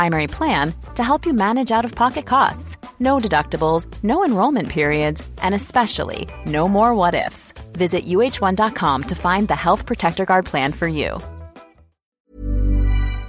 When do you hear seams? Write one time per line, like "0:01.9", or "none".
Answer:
0:12.1